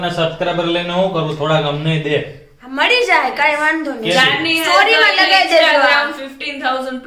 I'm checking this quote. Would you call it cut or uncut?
uncut